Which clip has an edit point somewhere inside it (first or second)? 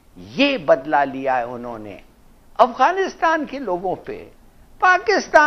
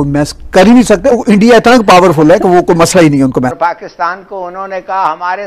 second